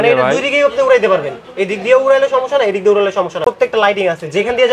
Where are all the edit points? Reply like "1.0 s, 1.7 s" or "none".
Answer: 3.4 s